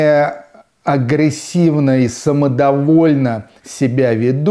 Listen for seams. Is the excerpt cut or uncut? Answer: uncut